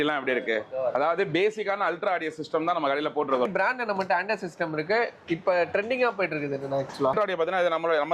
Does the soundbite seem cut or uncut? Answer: cut